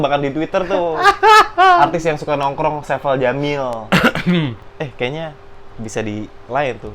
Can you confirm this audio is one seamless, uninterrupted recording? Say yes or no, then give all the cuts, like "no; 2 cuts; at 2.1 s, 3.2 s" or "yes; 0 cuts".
no; 1 cut; at 4.6 s